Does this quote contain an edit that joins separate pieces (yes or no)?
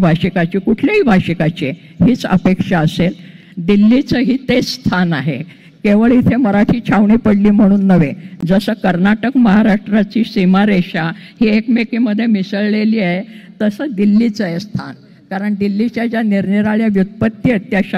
no